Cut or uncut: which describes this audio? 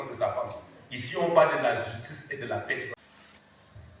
cut